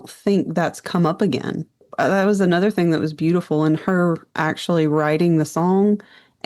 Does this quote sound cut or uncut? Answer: cut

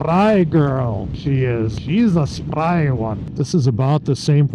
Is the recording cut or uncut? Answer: cut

